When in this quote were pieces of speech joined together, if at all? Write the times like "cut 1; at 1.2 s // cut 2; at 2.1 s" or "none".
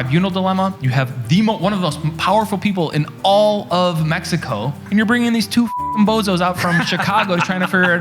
cut 1; at 4.8 s